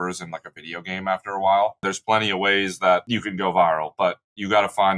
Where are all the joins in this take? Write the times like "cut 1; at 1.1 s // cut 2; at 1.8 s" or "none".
cut 1; at 1.9 s // cut 2; at 3.1 s